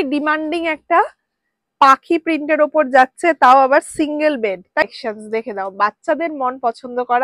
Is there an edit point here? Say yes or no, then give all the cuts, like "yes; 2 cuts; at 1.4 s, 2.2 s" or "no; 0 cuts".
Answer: yes; 1 cut; at 4.8 s